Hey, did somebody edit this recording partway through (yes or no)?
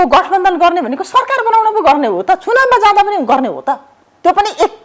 no